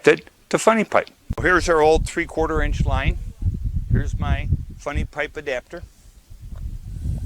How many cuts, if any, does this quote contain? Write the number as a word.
one